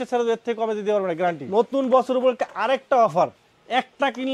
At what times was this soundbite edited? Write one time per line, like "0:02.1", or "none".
0:01.4

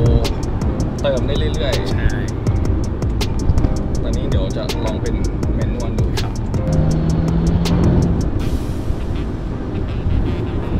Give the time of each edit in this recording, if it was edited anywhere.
none

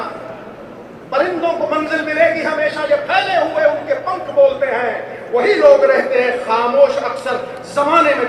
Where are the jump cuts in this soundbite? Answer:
none

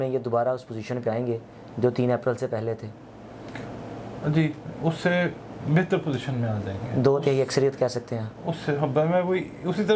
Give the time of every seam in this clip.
none

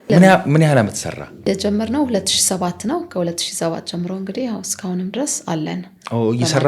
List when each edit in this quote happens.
0:01.4

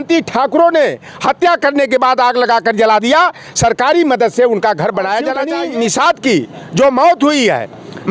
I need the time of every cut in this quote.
0:05.5

